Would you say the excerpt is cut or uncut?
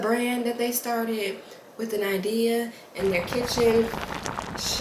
uncut